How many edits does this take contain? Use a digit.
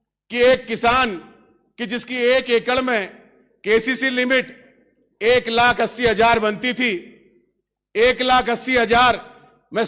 0